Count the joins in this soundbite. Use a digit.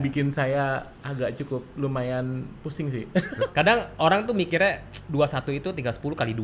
1